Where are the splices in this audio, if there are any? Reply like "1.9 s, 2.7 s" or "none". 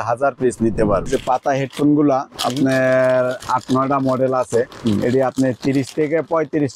1.1 s